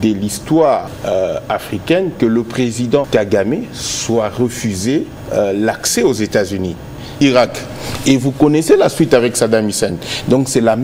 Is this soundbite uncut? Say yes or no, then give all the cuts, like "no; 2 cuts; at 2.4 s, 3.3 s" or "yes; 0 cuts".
no; 4 cuts; at 0.9 s, 3.1 s, 5.2 s, 7.2 s